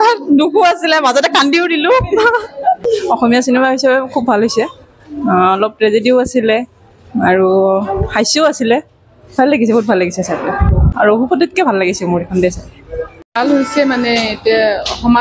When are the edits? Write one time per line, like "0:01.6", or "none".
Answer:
none